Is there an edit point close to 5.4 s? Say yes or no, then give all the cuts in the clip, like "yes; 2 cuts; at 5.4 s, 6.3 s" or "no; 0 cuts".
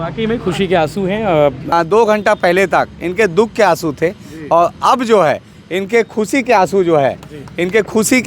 no; 1 cut; at 1.7 s